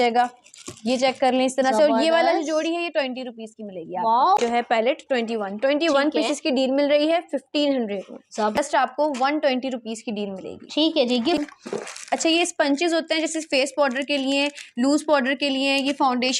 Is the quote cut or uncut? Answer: cut